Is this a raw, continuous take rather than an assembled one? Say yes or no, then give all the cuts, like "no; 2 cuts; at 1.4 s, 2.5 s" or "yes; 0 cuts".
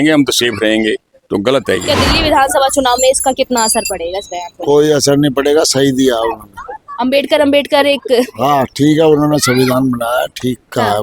no; 1 cut; at 1.8 s